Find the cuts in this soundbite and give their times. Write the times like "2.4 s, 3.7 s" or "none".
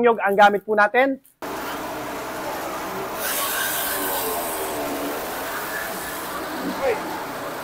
1.3 s